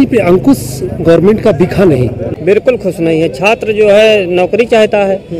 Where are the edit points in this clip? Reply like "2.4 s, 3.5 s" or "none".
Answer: 2.3 s

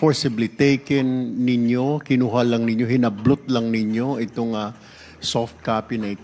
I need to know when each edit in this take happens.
none

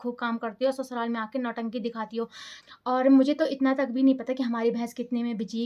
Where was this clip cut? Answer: 2.5 s

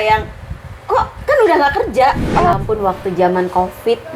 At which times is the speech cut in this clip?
2.5 s

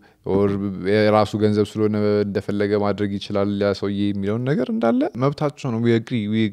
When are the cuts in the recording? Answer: 5.1 s

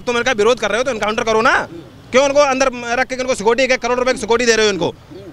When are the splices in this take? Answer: none

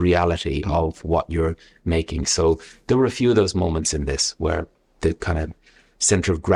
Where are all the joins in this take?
none

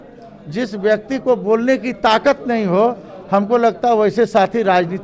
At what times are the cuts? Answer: none

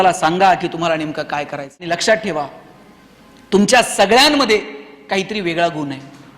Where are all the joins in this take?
1.9 s

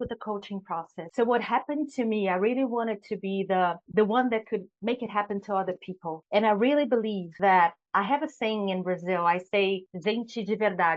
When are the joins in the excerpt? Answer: none

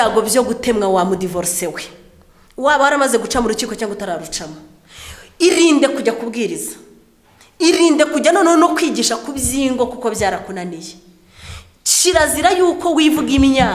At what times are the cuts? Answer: none

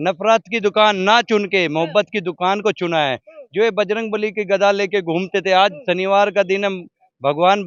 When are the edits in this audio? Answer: none

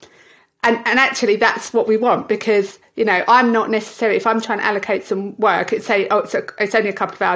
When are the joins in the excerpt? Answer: none

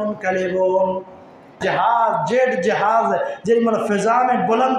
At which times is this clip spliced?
1.6 s

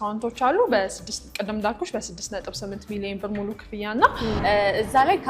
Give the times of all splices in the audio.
4.4 s

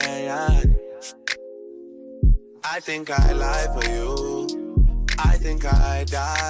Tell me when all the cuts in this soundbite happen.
5.4 s

